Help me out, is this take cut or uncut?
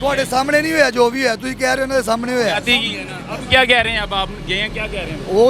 uncut